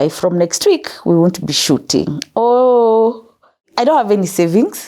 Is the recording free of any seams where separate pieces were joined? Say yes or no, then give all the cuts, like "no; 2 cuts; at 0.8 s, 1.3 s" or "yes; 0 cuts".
no; 1 cut; at 3.7 s